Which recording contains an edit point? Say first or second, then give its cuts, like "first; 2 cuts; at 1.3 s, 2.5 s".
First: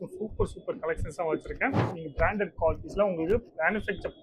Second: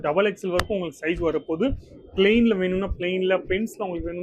first; 1 cut; at 1.9 s